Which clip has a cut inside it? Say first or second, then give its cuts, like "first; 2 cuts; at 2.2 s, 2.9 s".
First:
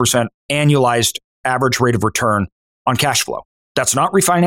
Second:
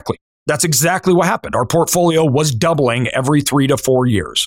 first; 2 cuts; at 2.6 s, 3.5 s